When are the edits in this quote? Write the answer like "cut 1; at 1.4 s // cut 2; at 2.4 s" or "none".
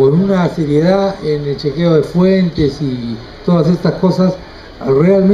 cut 1; at 3.4 s